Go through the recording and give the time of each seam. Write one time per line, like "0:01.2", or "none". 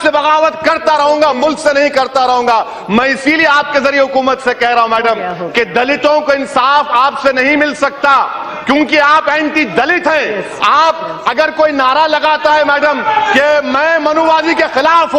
0:10.1